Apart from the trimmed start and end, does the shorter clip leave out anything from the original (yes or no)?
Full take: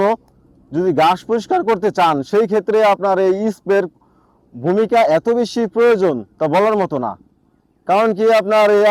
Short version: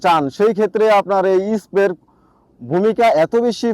no